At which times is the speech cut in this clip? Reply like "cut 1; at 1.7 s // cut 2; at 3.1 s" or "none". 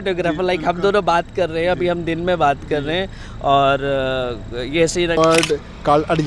cut 1; at 5.2 s